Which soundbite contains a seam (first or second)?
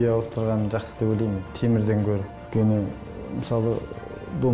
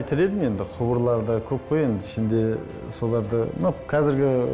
first